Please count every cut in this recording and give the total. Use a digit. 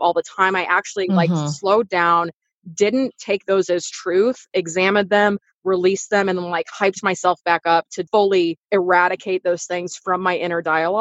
2